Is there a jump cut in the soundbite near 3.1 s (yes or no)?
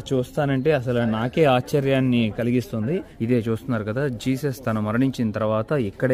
yes